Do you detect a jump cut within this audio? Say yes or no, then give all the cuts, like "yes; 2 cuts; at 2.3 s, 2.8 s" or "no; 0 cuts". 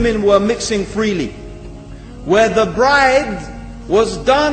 no; 0 cuts